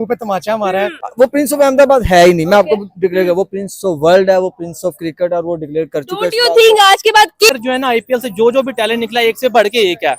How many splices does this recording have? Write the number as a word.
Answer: two